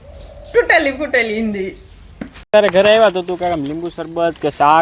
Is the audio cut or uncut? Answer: cut